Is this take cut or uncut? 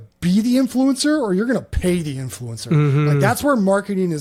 uncut